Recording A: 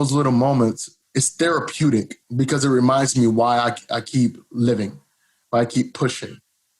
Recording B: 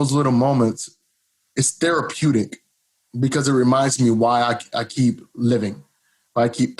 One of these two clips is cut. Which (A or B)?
A